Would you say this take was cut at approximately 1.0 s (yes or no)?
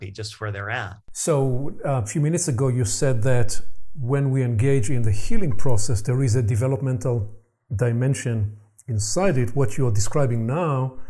yes